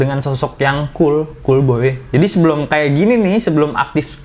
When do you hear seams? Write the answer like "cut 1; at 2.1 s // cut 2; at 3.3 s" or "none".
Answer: none